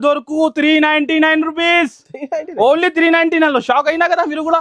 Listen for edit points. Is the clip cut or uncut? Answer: uncut